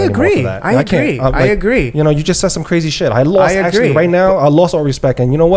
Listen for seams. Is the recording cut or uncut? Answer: uncut